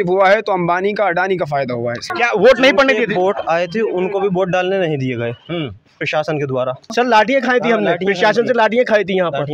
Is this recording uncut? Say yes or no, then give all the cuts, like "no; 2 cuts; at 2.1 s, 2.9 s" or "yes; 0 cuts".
no; 2 cuts; at 2.1 s, 6.9 s